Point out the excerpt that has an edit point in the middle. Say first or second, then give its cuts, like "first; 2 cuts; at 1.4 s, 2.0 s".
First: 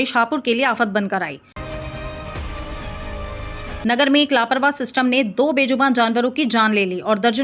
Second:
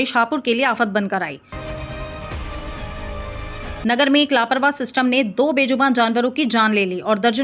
first; 2 cuts; at 1.5 s, 3.8 s